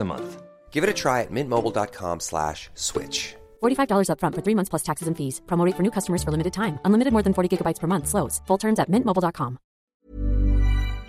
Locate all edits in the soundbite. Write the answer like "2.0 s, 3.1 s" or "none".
9.8 s